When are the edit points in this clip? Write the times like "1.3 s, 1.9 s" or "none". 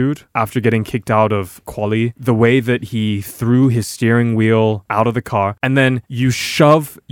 1.6 s, 5.0 s